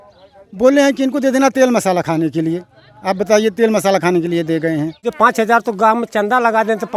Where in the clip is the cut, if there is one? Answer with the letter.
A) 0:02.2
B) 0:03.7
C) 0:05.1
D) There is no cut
C